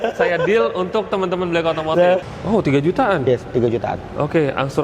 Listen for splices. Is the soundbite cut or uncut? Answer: cut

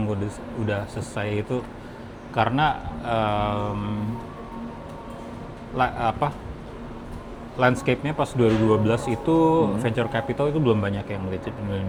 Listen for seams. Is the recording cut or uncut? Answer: uncut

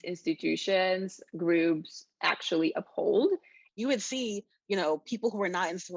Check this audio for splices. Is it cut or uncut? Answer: cut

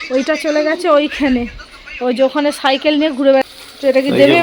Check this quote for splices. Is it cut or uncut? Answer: cut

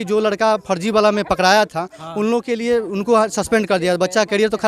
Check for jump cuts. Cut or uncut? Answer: uncut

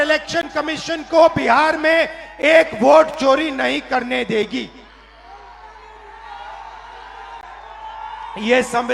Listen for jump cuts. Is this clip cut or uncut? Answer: uncut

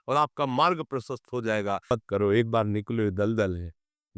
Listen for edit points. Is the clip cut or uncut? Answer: cut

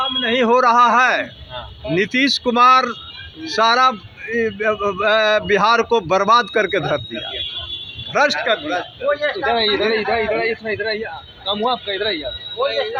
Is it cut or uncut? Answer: uncut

